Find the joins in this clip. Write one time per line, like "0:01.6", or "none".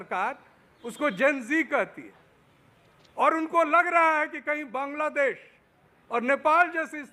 none